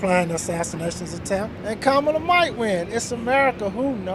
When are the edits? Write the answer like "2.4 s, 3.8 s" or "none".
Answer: none

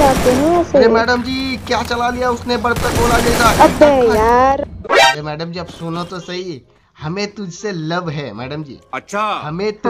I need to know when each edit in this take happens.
5.1 s

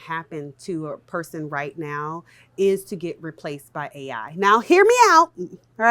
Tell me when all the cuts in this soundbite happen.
none

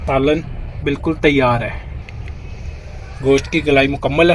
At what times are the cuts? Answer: 2.0 s

